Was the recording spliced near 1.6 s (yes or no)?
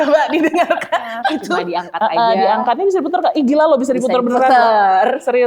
yes